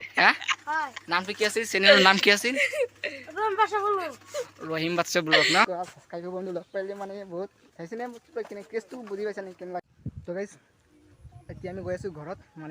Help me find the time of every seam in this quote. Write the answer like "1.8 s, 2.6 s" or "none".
5.7 s, 7.7 s, 9.9 s